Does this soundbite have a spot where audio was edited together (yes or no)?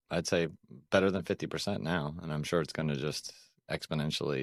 no